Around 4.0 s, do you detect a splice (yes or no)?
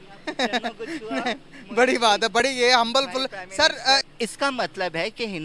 yes